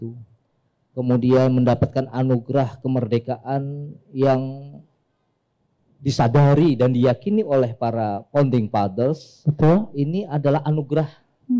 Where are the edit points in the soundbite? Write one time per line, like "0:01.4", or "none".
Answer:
none

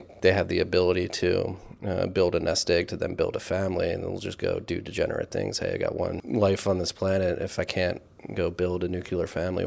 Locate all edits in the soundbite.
0:06.2

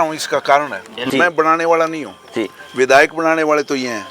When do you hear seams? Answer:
0:01.0

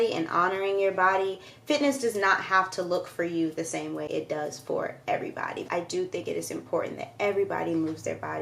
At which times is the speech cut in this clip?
0:05.6

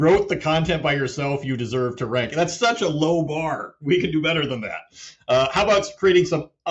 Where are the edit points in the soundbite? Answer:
none

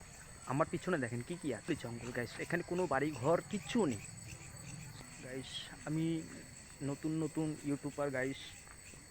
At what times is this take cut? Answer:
0:01.7
0:05.0

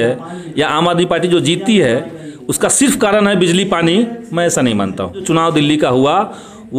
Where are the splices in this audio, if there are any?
0:05.2

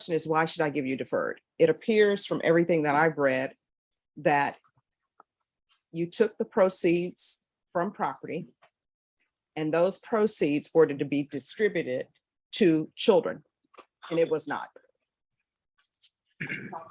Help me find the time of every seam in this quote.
none

